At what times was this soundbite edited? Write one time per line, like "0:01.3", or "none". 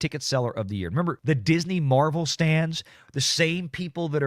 0:01.2

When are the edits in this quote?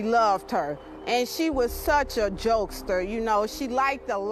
none

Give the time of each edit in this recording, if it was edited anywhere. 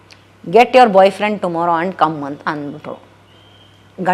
none

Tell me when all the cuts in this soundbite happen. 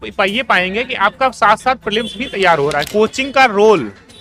0:02.9

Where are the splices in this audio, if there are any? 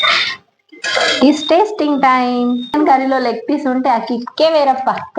0:02.7

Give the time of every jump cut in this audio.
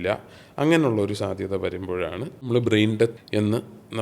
0:02.5
0:03.2

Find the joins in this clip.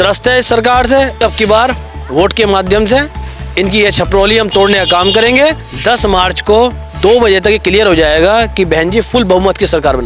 0:01.2
0:05.7
0:06.9

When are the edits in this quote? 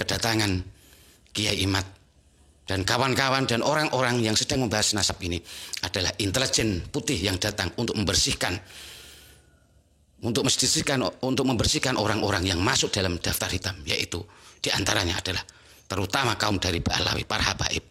none

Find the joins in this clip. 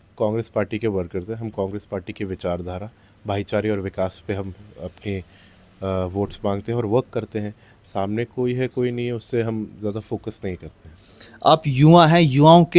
none

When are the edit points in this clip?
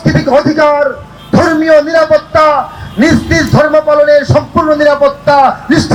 none

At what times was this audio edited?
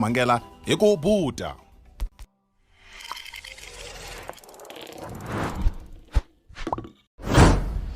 0:07.0

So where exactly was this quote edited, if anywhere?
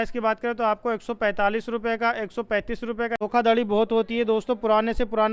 0:03.1

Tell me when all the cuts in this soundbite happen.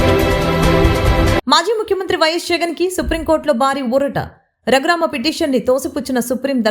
0:01.0

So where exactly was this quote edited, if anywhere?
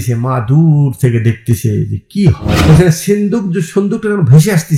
0:02.5

